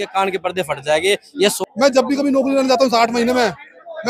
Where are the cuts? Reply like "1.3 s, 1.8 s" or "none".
1.6 s